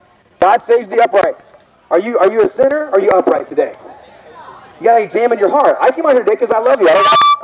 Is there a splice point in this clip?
no; 0 cuts

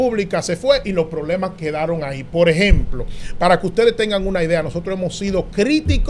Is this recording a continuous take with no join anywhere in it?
yes; 0 cuts

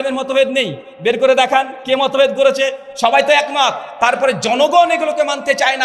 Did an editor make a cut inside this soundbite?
no; 0 cuts

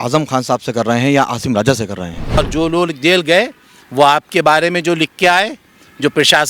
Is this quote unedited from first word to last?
no; 1 cut; at 2.4 s

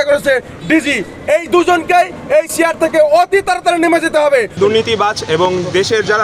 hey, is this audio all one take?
no; 1 cut; at 4.5 s

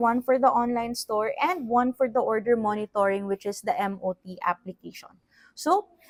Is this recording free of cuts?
yes; 0 cuts

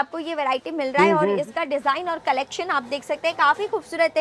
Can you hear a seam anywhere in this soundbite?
no; 0 cuts

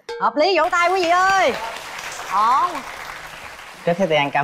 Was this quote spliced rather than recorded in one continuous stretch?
no; 0 cuts

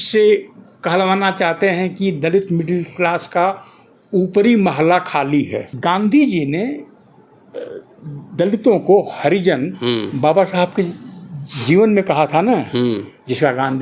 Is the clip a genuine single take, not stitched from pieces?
no; 1 cut; at 5.6 s

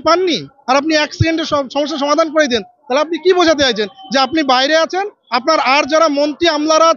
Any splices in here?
no; 0 cuts

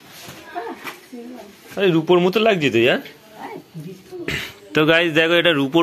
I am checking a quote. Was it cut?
no; 0 cuts

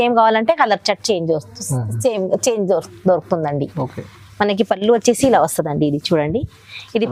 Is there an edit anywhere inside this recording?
no; 0 cuts

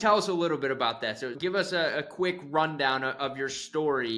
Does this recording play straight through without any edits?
no; 1 cut; at 1.4 s

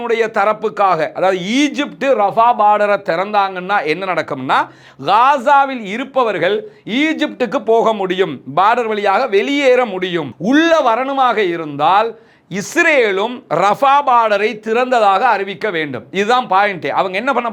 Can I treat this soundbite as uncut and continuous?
yes; 0 cuts

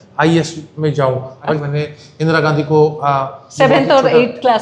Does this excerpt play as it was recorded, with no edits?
no; 1 cut; at 1.6 s

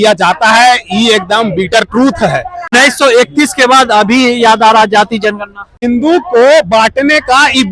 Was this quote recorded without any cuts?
no; 2 cuts; at 2.7 s, 5.8 s

